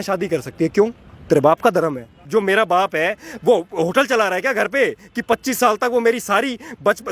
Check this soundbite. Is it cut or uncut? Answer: cut